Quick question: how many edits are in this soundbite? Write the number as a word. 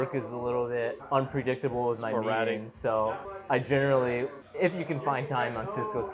three